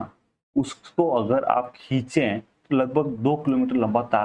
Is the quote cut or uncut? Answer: uncut